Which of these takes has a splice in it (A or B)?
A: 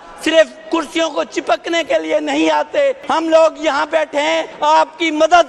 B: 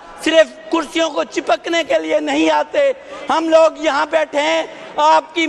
A